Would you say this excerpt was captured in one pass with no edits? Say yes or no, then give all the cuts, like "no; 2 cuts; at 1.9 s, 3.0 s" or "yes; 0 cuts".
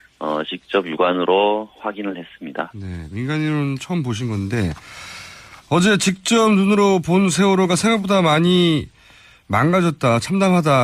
no; 1 cut; at 4.5 s